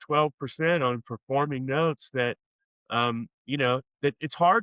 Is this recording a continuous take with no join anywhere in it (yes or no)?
yes